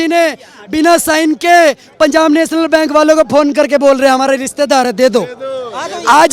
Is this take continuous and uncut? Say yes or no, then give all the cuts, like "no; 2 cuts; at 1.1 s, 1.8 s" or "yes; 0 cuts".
yes; 0 cuts